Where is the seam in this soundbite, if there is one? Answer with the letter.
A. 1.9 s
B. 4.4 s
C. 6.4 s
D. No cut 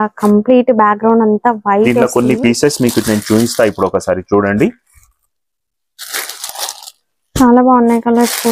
A